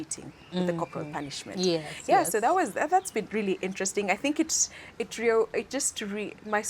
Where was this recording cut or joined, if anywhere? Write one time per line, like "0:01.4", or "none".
none